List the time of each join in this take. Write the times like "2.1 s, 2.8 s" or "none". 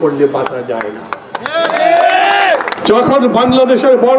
2.7 s